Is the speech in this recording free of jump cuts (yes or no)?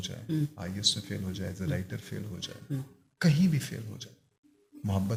yes